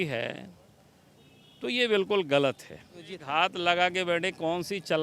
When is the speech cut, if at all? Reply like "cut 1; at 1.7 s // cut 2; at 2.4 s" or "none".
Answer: cut 1; at 3.2 s

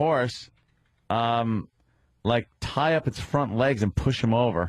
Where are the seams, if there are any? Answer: cut 1; at 1.8 s

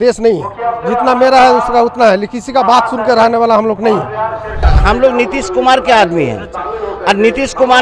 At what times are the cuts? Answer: cut 1; at 4.6 s

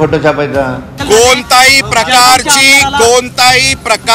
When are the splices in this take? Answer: cut 1; at 0.9 s

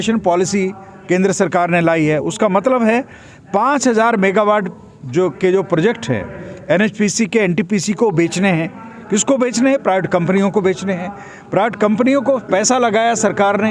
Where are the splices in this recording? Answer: none

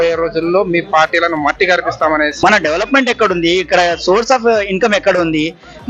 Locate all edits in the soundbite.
cut 1; at 2.3 s

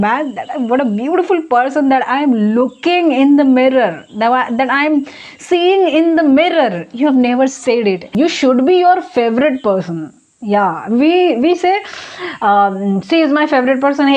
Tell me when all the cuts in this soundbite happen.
cut 1; at 8.1 s

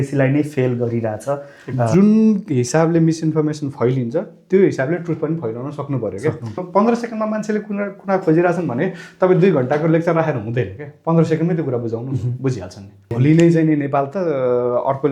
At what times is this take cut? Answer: cut 1; at 1.9 s // cut 2; at 6.6 s // cut 3; at 13.1 s

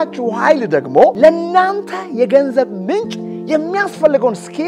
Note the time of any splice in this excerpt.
cut 1; at 1.1 s

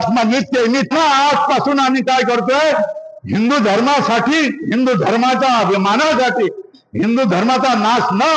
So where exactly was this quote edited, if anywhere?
cut 1; at 0.9 s

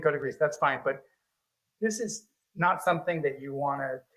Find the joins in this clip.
none

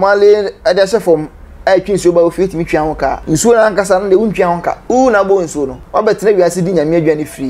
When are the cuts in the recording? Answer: cut 1; at 3.2 s // cut 2; at 4.8 s // cut 3; at 5.8 s

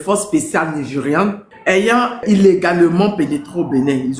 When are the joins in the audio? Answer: cut 1; at 2.2 s

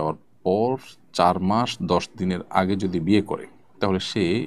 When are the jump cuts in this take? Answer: none

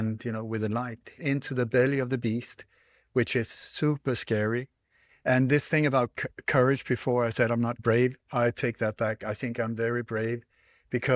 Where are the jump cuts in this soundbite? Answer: cut 1; at 1.2 s

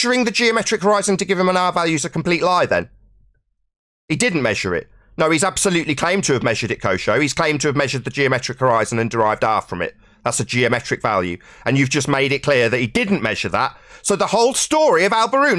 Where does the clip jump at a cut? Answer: none

